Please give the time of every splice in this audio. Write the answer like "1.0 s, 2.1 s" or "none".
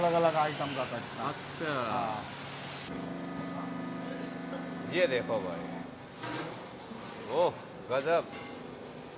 2.9 s